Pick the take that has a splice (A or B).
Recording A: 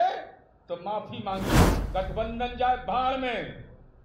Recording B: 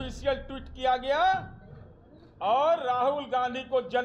A